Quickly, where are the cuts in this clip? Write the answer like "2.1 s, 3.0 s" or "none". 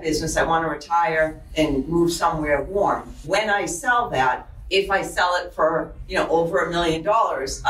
3.2 s, 4.5 s, 6.0 s